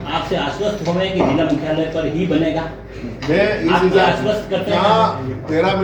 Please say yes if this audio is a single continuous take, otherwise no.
yes